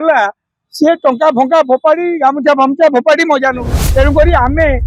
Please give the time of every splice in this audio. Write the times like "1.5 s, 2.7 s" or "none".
3.7 s